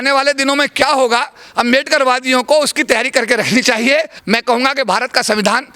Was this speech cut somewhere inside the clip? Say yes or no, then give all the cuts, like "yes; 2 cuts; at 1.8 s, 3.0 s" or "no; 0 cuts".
yes; 1 cut; at 4.2 s